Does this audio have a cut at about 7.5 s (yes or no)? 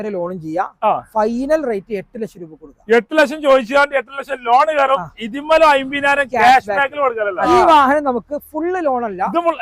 yes